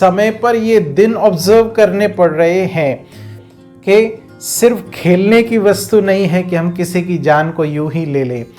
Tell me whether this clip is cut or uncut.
cut